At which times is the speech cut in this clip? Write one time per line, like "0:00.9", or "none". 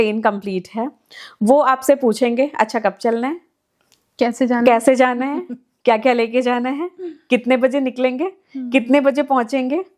none